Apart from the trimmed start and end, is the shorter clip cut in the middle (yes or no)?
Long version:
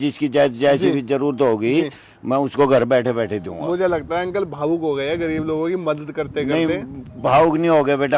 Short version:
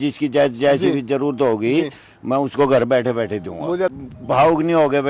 yes